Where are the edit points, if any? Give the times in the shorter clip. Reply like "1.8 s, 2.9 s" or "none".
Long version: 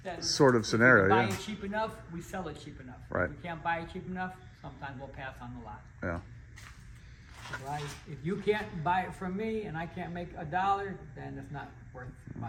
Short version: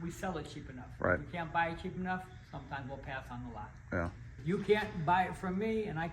4.3 s